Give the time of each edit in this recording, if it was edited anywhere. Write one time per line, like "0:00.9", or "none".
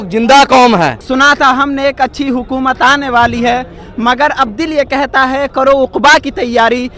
0:01.0